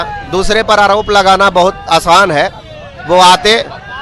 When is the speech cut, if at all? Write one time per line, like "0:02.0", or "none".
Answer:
none